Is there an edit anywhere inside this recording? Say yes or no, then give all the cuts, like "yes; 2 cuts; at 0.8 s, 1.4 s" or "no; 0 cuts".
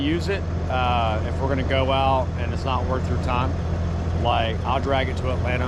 no; 0 cuts